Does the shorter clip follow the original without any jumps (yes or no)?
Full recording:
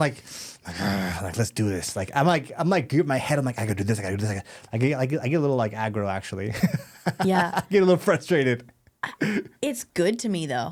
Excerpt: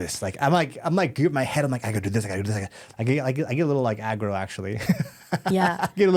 yes